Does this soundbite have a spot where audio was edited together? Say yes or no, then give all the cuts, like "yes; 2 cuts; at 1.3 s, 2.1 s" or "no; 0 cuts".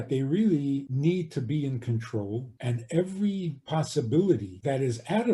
yes; 4 cuts; at 0.9 s, 2.5 s, 3.6 s, 4.5 s